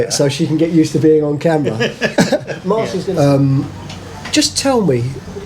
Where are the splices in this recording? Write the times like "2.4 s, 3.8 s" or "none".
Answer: 3.0 s